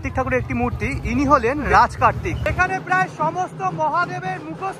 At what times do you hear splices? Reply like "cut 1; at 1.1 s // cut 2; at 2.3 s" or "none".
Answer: cut 1; at 1.7 s // cut 2; at 2.5 s